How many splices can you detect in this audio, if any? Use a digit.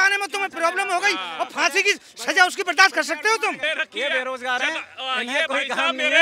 1